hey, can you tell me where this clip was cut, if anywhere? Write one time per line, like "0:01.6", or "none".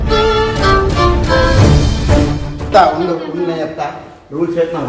0:02.7